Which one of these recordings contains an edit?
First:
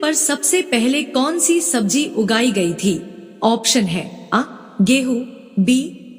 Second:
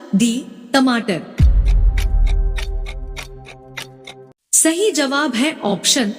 second; 2 cuts; at 1.3 s, 4.4 s

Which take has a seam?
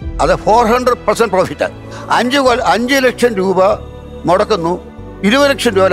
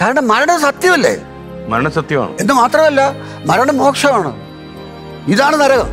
first; 1 cut; at 1.9 s

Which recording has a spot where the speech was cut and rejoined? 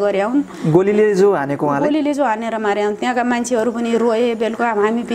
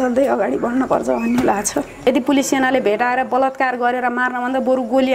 second; 1 cut; at 1.9 s

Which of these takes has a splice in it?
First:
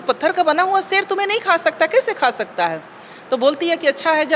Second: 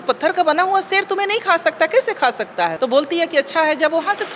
second; 1 cut; at 2.7 s

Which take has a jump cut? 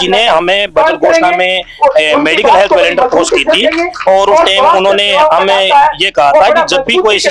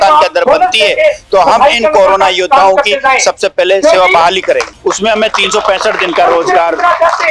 second; 1 cut; at 4.7 s

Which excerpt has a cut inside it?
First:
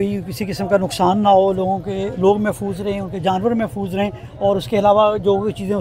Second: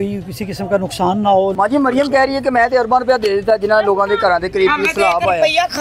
second; 1 cut; at 1.5 s

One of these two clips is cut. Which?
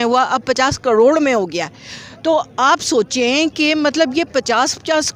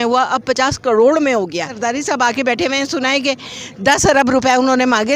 second; 1 cut; at 1.8 s

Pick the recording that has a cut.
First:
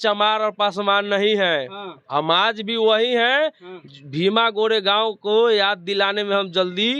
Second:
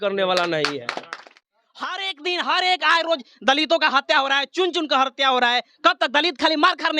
second; 1 cut; at 1.3 s

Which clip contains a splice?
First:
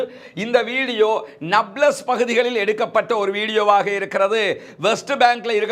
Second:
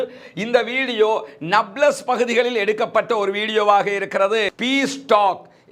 second; 1 cut; at 4.5 s

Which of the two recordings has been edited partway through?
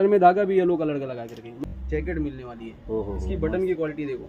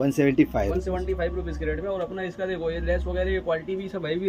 first; 1 cut; at 1.6 s

